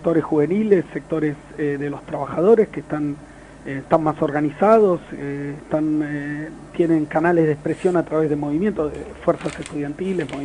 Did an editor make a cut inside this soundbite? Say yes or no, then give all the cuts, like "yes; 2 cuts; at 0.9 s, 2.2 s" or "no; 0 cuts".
yes; 1 cut; at 1.6 s